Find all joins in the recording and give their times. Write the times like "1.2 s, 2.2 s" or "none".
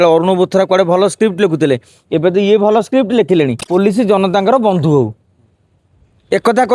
3.6 s